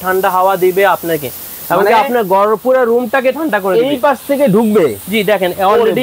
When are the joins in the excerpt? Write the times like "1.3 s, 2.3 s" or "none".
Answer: none